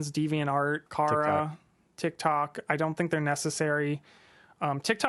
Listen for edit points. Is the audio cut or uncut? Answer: uncut